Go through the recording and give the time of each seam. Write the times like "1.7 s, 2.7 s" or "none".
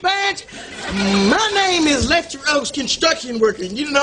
none